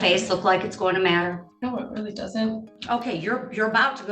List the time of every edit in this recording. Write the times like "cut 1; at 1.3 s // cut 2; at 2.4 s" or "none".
cut 1; at 1.5 s // cut 2; at 2.7 s